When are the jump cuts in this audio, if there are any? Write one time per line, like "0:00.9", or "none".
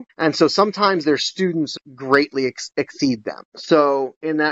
0:01.7